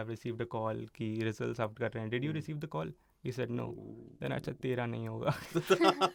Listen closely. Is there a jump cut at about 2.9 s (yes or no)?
no